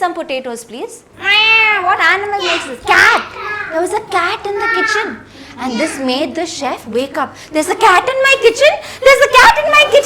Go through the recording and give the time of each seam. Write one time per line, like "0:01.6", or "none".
0:01.1